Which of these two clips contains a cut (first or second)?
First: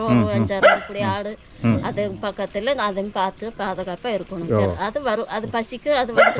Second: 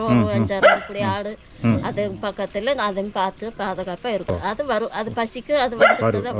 second